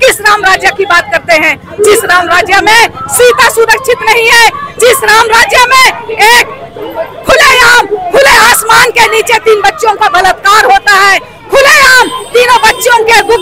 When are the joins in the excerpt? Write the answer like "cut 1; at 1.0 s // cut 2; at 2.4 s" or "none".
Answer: none